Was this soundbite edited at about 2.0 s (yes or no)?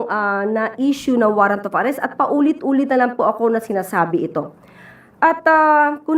no